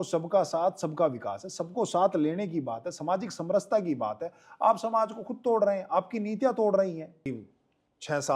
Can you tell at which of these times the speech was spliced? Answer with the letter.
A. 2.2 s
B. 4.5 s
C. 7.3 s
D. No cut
C